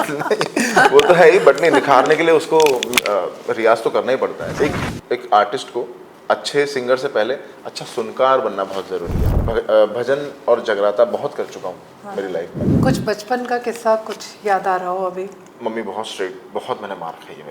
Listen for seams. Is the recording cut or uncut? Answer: cut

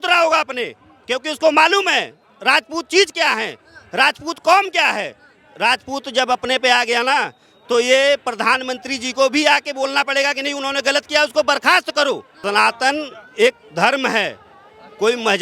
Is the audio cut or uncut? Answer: cut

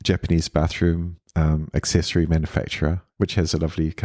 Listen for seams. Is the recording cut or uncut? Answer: cut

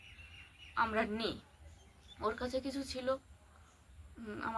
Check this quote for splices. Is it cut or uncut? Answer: uncut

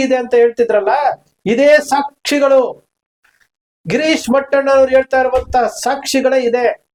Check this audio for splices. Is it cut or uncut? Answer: uncut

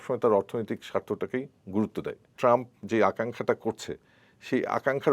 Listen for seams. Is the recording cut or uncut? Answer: cut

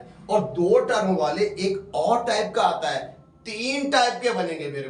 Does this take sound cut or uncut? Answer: uncut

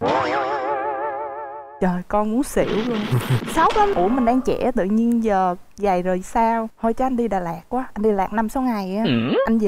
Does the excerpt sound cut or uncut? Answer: cut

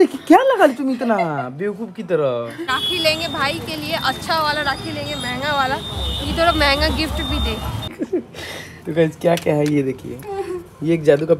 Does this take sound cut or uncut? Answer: cut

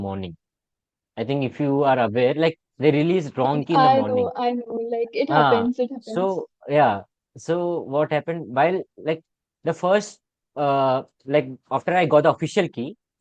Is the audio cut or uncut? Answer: uncut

